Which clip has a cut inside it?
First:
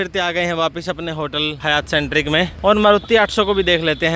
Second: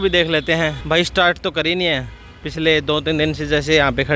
first; 2 cuts; at 1.6 s, 2.5 s

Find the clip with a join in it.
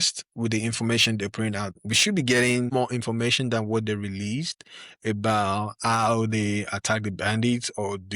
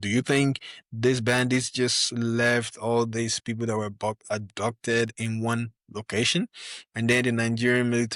first; 2 cuts; at 1.7 s, 2.7 s

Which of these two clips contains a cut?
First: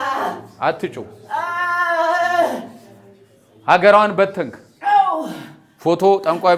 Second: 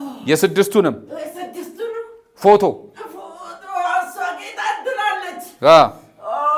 second; 1 cut; at 5.4 s

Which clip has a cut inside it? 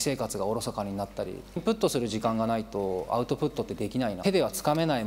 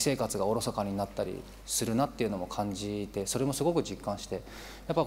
first; 2 cuts; at 1.6 s, 4.2 s

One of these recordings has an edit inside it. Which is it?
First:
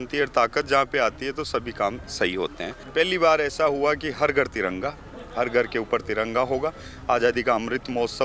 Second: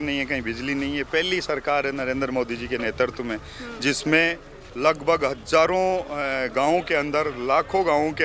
first; 1 cut; at 2.8 s

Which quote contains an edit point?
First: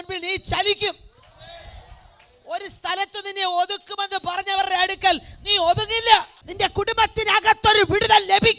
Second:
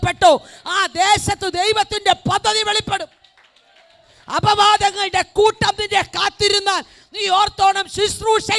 first; 1 cut; at 6.4 s

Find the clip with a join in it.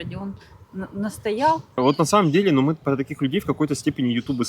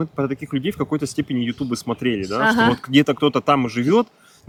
first; 1 cut; at 1.8 s

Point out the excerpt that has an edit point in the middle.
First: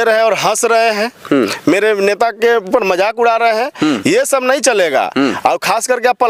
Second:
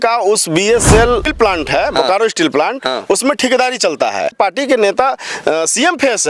second; 2 cuts; at 1.3 s, 4.3 s

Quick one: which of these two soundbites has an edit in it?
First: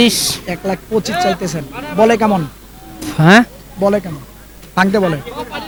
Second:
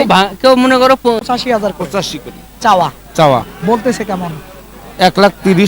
second; 1 cut; at 1.0 s

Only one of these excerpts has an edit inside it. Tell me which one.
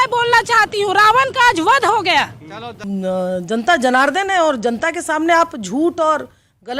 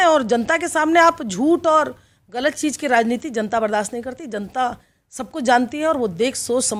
first; 1 cut; at 2.7 s

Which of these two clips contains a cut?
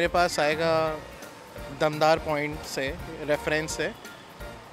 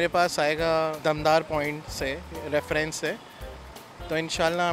second; 1 cut; at 1.0 s

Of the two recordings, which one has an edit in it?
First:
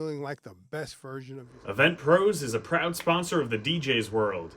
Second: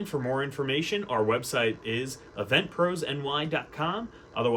first; 1 cut; at 1.5 s

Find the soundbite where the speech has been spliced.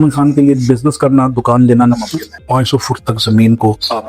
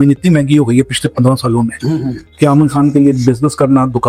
first; 1 cut; at 2.4 s

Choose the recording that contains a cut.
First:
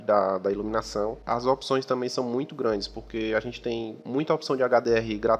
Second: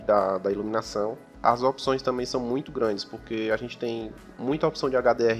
first; 2 cuts; at 1.2 s, 4.0 s

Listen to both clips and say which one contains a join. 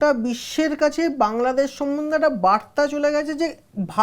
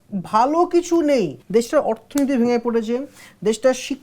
second; 1 cut; at 1.4 s

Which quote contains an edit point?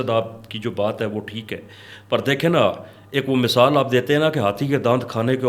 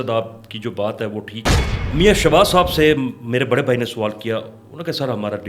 second; 1 cut; at 1.7 s

